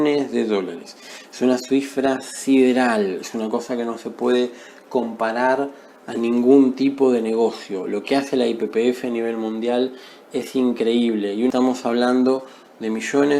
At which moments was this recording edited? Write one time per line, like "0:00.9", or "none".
0:11.5